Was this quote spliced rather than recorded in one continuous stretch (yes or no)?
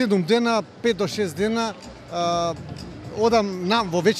no